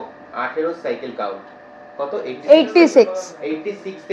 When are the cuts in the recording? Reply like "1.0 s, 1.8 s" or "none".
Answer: none

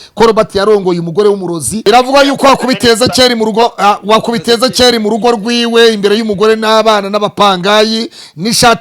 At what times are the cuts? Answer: 1.8 s

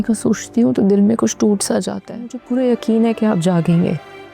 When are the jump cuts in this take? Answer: 2.4 s

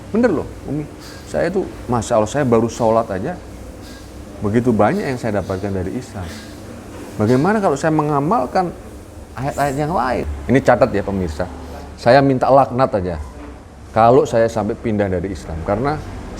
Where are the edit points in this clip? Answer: 10.3 s

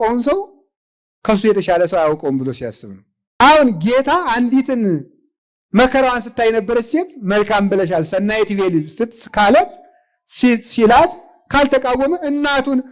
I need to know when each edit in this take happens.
3.4 s

